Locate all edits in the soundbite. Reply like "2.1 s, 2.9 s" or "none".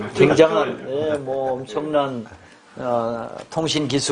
none